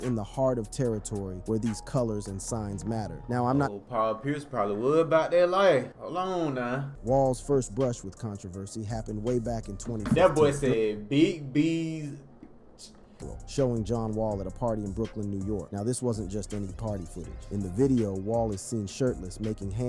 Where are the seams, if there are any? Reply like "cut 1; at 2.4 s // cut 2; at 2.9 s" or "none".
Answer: cut 1; at 6.0 s // cut 2; at 6.9 s // cut 3; at 13.3 s